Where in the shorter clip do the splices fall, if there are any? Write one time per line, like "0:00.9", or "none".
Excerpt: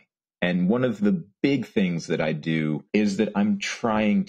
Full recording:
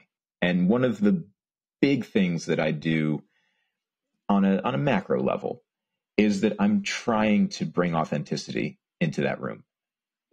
0:01.3
0:02.8